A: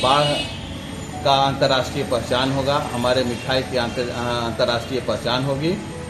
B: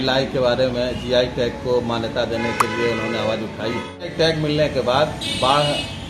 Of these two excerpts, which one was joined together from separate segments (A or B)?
B